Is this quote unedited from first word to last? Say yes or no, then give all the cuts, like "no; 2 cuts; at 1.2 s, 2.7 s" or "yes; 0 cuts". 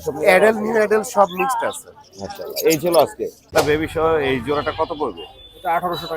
no; 1 cut; at 3.5 s